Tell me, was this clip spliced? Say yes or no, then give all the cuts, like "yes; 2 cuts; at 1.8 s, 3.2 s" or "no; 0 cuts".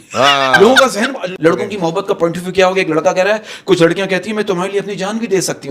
yes; 1 cut; at 1.2 s